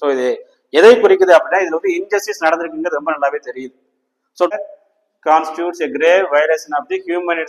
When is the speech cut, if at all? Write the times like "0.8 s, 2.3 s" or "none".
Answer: 4.5 s

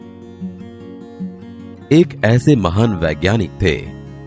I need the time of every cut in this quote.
1.9 s

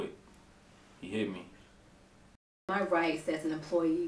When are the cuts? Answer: 2.7 s

